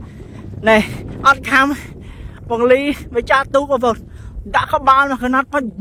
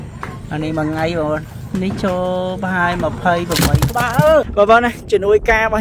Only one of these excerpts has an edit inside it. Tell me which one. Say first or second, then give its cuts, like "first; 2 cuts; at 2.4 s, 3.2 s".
second; 1 cut; at 4.5 s